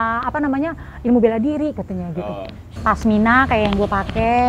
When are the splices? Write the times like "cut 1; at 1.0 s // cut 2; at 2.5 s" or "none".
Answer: cut 1; at 2.7 s

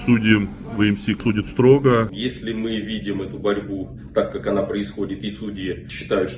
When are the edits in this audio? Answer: cut 1; at 1.2 s // cut 2; at 2.2 s

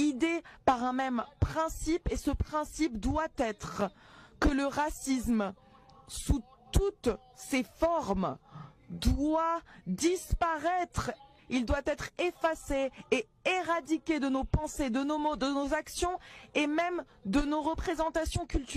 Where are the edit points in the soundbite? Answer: none

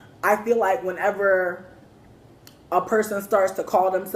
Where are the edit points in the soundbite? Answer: cut 1; at 2.9 s

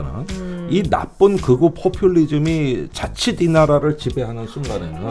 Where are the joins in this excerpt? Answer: none

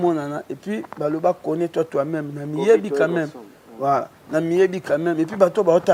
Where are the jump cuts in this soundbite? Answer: none

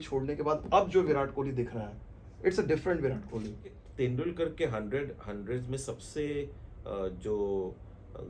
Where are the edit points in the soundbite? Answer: cut 1; at 3.8 s

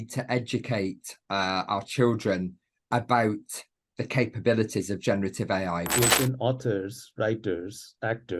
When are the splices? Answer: cut 1; at 5.9 s

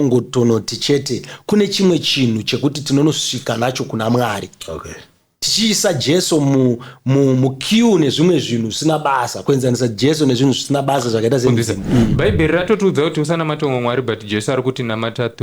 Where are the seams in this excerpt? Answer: cut 1; at 11.7 s

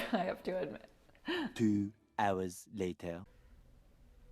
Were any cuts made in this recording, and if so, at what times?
cut 1; at 1.5 s

